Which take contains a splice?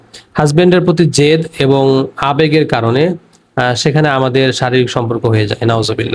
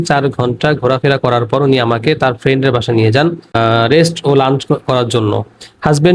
second; 1 cut; at 3.5 s

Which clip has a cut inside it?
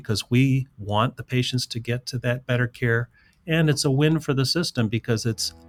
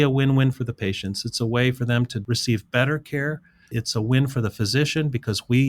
second; 1 cut; at 3.7 s

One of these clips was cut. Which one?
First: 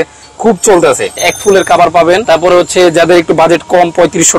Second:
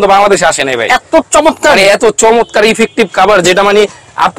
first; 2 cuts; at 1.3 s, 2.3 s

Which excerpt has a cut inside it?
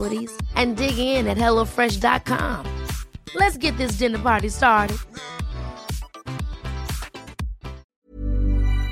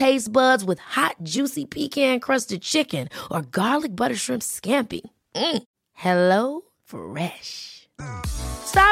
first; 1 cut; at 7.9 s

